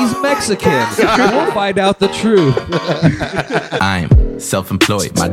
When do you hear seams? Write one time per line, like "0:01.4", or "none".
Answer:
0:03.8